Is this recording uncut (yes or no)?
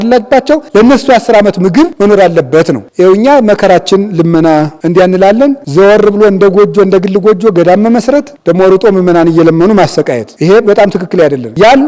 yes